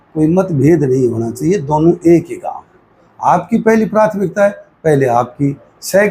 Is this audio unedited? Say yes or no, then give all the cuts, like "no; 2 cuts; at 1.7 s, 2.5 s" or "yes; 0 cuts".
yes; 0 cuts